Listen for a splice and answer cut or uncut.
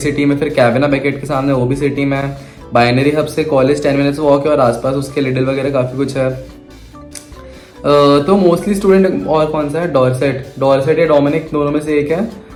uncut